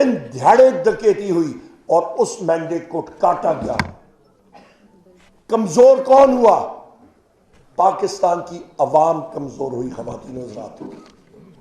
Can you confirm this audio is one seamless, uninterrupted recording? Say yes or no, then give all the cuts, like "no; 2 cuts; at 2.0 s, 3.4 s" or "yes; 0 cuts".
yes; 0 cuts